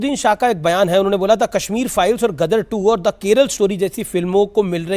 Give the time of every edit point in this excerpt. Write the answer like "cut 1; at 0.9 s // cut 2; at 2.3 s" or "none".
none

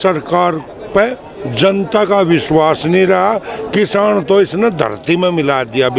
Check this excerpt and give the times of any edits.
none

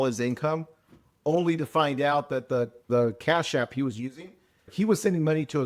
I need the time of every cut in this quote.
cut 1; at 2.9 s // cut 2; at 4.7 s

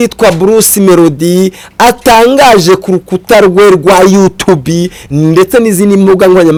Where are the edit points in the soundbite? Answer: none

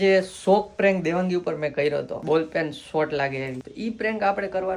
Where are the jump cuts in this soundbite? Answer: cut 1; at 2.2 s // cut 2; at 3.6 s

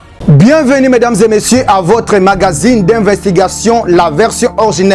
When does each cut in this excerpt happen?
cut 1; at 0.9 s

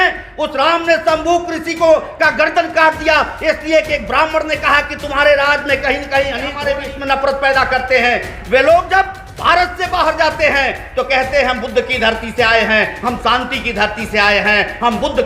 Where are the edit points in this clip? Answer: cut 1; at 6.6 s

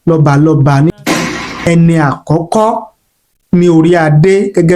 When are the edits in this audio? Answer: cut 1; at 1.2 s

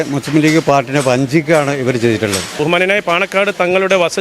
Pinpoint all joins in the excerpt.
cut 1; at 2.6 s

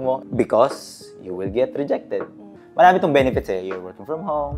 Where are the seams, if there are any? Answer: none

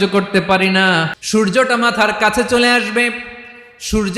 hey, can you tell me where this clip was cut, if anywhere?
cut 1; at 1.1 s

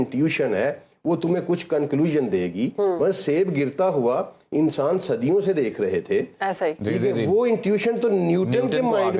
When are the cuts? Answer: none

